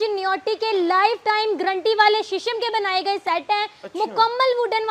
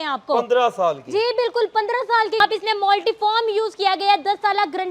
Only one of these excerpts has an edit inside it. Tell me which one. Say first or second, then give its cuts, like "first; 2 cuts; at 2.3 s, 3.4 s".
second; 1 cut; at 2.4 s